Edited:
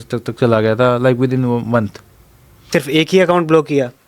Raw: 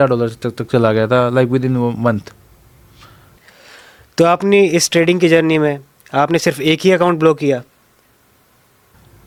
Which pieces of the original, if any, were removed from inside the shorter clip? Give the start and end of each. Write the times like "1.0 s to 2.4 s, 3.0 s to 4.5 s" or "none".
3.0 s to 6.4 s